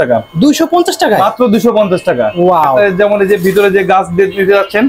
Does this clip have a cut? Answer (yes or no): yes